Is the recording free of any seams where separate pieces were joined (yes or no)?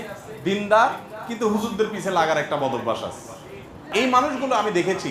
no